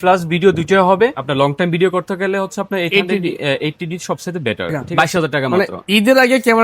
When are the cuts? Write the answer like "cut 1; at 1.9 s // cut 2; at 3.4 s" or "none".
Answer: cut 1; at 1.2 s // cut 2; at 4.8 s